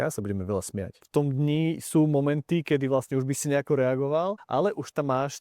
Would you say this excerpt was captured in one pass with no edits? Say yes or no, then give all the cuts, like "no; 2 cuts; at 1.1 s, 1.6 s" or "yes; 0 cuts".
no; 2 cuts; at 1.0 s, 4.4 s